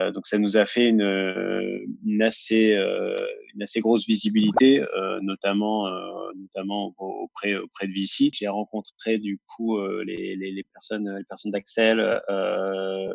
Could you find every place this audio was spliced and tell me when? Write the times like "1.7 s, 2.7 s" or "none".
8.4 s